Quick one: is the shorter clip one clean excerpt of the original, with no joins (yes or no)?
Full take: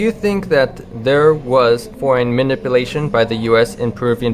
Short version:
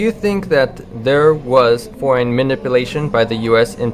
yes